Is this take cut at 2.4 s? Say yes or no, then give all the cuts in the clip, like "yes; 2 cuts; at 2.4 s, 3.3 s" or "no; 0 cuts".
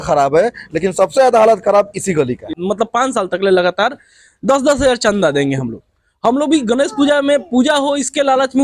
yes; 1 cut; at 2.4 s